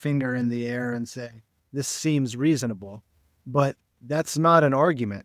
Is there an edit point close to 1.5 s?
no; 1 cut; at 3.9 s

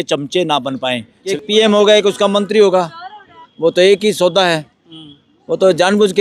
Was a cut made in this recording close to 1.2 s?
yes; 1 cut; at 1.2 s

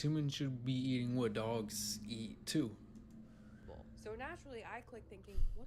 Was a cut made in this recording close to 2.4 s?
no; 1 cut; at 4.4 s

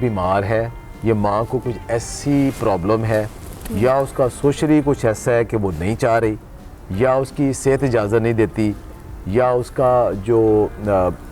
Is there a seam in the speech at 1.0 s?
no; 0 cuts

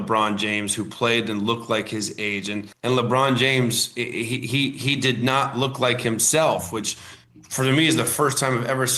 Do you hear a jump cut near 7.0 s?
no; 1 cut; at 2.7 s

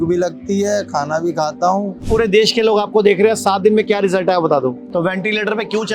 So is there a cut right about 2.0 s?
yes; 2 cuts; at 2.0 s, 4.8 s

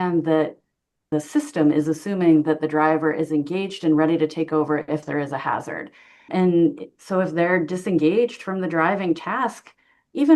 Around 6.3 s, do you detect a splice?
yes; 2 cuts; at 1.1 s, 6.3 s

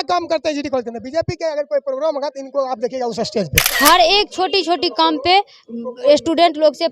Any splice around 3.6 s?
yes; 1 cut; at 3.6 s

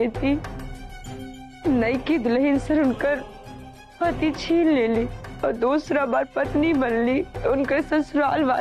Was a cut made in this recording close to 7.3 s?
yes; 1 cut; at 7.3 s

